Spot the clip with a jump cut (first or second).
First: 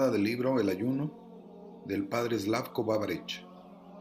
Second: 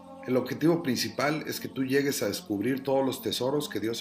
second